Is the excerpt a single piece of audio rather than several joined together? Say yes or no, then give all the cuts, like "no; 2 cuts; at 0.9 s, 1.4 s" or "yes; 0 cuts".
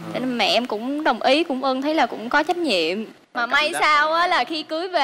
yes; 0 cuts